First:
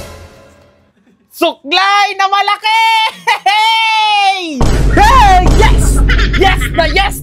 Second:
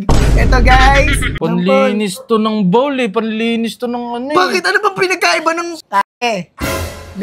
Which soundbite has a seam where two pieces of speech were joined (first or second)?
second